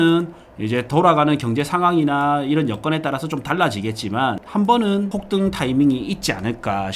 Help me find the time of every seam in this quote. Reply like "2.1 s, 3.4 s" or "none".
4.4 s, 5.1 s

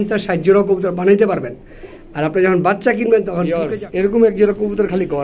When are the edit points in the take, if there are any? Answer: 3.5 s

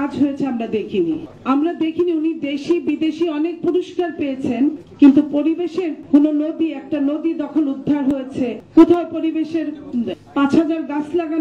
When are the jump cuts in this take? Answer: 6.0 s, 8.6 s, 10.2 s

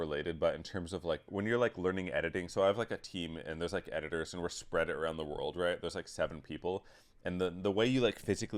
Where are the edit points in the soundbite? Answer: 1.3 s

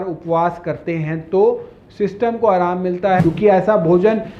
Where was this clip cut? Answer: 3.2 s

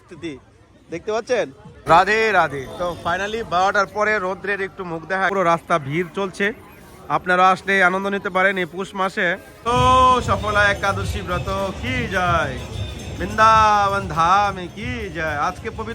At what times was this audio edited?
1.7 s, 5.3 s, 9.5 s

